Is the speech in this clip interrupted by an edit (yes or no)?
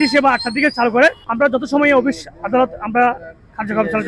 yes